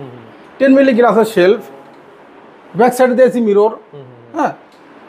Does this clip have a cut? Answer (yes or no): no